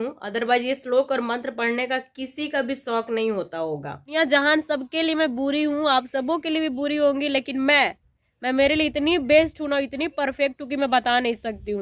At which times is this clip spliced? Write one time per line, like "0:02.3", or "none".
0:04.1